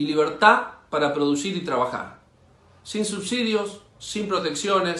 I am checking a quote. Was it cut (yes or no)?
no